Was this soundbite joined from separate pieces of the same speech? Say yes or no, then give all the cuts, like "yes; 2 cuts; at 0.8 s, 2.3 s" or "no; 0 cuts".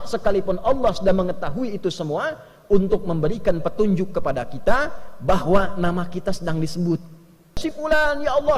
yes; 1 cut; at 7.6 s